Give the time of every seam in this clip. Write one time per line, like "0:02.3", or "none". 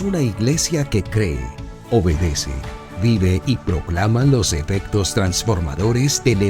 none